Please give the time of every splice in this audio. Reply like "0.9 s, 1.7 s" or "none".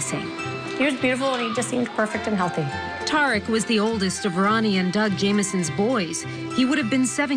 1.1 s